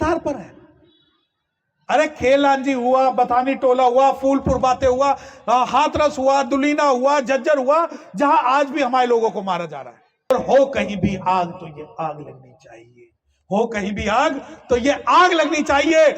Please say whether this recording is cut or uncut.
cut